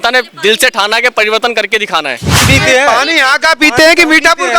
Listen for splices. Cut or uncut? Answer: cut